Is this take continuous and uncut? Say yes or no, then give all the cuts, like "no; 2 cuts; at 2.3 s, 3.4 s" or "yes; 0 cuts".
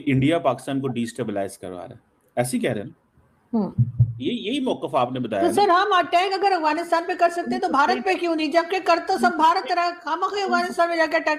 yes; 0 cuts